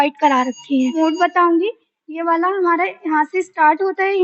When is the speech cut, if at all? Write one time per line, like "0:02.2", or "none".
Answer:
0:01.0